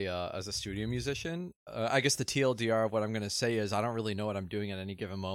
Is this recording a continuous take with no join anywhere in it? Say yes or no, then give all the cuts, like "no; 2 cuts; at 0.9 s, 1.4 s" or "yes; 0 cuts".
no; 1 cut; at 1.5 s